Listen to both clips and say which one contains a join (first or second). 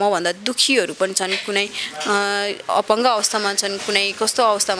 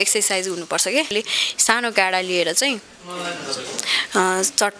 second